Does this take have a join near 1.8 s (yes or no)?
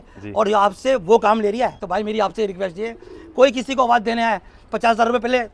yes